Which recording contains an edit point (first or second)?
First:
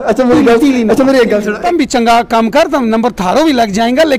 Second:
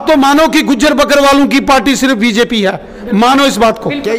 first